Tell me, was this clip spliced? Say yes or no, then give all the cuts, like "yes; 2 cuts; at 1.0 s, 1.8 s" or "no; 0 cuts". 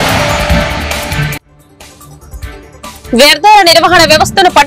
no; 0 cuts